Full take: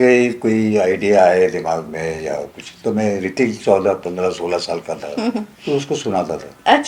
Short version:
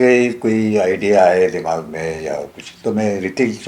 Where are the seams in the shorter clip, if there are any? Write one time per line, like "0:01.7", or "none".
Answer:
none